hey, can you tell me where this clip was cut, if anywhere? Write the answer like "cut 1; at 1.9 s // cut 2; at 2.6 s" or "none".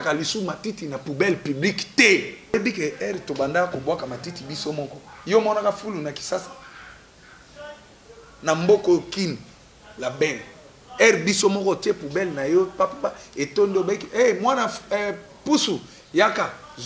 cut 1; at 2.5 s